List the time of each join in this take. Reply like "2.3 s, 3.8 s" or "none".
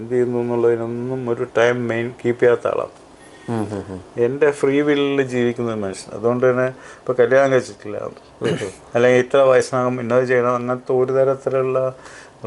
none